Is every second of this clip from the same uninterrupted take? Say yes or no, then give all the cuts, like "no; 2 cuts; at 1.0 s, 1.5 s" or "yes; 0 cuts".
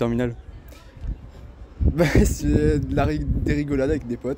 yes; 0 cuts